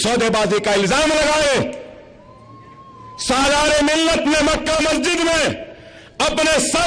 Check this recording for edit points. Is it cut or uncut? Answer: uncut